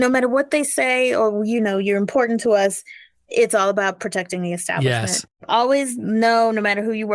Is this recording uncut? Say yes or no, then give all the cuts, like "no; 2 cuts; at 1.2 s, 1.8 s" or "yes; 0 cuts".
no; 1 cut; at 5.3 s